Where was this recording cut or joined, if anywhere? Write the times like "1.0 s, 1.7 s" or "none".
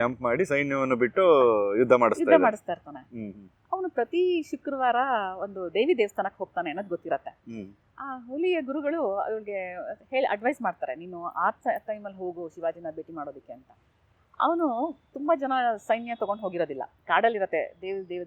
none